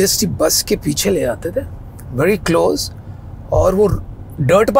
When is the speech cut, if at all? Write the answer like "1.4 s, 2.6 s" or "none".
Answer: none